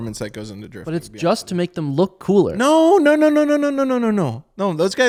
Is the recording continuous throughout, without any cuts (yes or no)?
yes